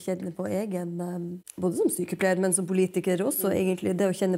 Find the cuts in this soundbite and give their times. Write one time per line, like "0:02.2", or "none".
0:01.4